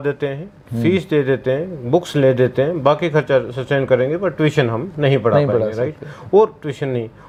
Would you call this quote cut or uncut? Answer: uncut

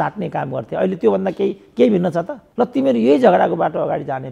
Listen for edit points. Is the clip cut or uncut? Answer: cut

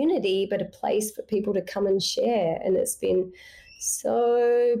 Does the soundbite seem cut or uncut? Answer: uncut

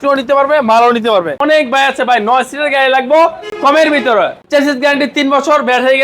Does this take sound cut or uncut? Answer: cut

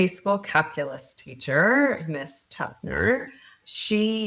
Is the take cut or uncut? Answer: uncut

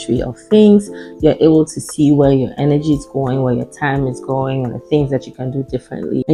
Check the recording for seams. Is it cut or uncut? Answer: uncut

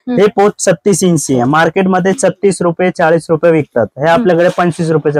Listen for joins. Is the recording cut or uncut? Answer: uncut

